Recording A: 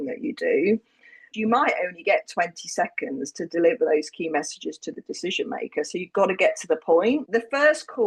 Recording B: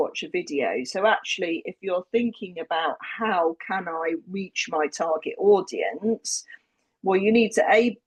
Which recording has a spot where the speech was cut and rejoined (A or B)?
A